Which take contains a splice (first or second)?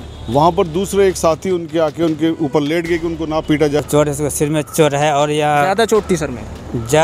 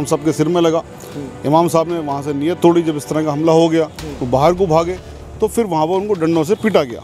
first